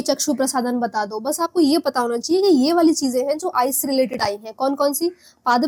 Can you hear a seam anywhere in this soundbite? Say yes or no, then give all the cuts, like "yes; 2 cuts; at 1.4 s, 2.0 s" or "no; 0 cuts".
no; 0 cuts